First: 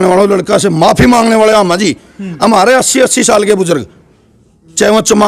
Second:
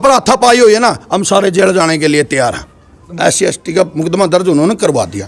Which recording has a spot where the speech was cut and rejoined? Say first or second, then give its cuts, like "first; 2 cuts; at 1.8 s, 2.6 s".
second; 1 cut; at 3.1 s